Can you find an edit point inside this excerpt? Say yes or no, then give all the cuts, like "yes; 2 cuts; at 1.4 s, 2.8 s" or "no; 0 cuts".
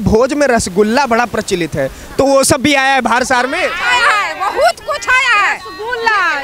no; 0 cuts